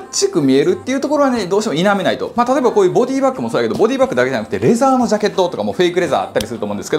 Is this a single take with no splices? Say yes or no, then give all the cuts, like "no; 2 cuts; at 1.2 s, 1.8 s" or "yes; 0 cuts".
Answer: yes; 0 cuts